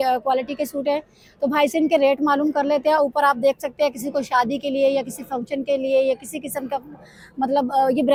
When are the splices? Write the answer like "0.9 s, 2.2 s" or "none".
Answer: none